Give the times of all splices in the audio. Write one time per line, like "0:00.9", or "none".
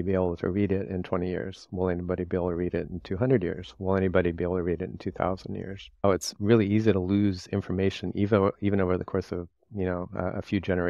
0:06.0